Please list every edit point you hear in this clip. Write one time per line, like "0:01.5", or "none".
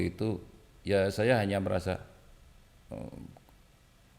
none